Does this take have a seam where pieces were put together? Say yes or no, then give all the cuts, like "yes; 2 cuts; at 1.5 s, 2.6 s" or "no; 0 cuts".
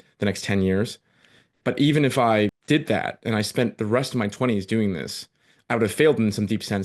yes; 1 cut; at 2.6 s